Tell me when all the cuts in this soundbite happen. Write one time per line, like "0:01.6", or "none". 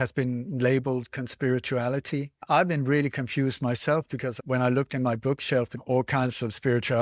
0:02.4
0:04.4
0:05.8